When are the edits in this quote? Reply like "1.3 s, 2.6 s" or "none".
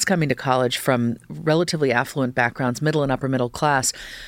none